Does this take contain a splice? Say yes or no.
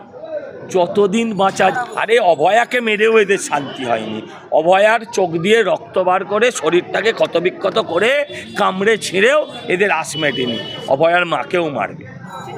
yes